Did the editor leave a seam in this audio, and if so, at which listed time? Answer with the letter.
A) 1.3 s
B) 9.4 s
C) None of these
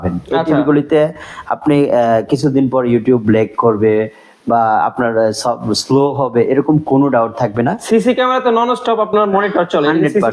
C